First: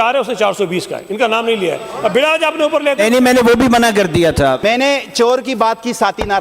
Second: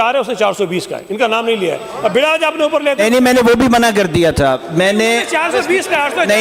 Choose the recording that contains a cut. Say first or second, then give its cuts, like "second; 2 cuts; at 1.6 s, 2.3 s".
first; 1 cut; at 4.6 s